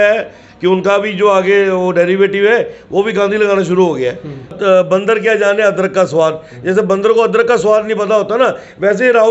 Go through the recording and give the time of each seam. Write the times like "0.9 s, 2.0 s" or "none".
4.5 s